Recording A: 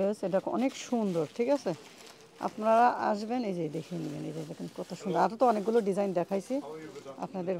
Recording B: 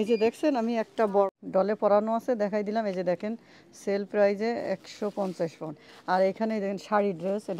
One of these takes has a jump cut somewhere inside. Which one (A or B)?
B